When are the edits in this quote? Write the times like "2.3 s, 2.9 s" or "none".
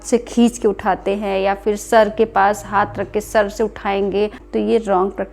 4.4 s